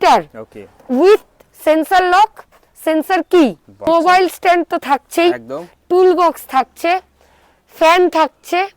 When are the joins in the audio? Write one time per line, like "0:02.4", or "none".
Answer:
0:03.9